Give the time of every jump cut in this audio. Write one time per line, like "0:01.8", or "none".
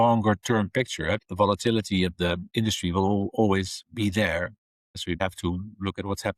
0:05.2

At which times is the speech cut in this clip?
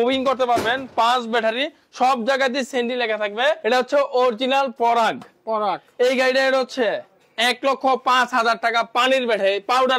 0:03.6

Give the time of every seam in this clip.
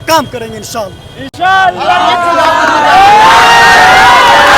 none

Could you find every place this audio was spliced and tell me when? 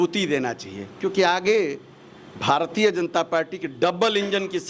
none

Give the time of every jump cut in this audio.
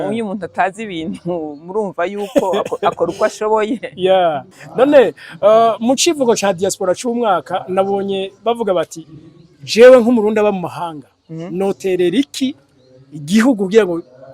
0:04.5

